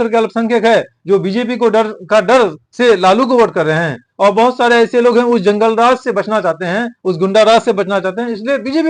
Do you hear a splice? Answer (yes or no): no